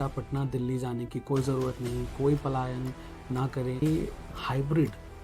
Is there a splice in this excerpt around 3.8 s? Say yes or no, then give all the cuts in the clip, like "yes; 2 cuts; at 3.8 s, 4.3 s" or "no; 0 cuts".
yes; 1 cut; at 3.8 s